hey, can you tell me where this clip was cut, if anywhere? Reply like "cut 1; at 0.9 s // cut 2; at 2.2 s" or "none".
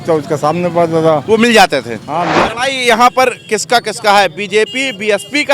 cut 1; at 2.3 s